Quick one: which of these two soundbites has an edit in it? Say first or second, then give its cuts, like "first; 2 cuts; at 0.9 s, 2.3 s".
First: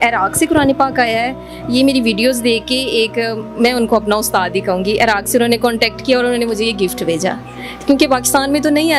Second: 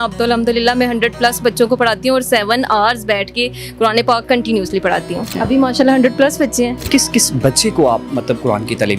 second; 2 cuts; at 5.3 s, 6.8 s